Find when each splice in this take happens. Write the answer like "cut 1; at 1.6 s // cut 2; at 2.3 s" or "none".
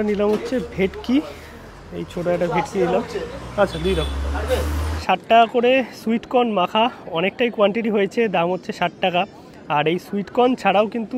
cut 1; at 5.0 s